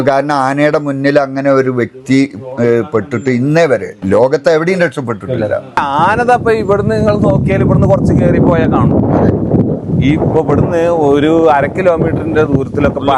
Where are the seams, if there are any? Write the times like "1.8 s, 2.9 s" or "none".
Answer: 4.0 s, 5.8 s